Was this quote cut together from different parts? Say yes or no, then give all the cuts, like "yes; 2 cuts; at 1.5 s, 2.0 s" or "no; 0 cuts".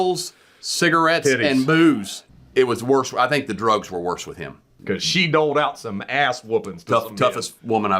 yes; 2 cuts; at 2.2 s, 4.7 s